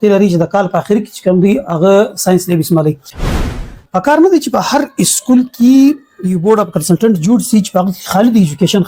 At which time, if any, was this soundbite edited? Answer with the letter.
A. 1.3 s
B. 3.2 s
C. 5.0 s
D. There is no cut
B